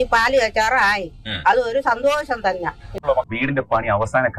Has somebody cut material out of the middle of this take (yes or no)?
yes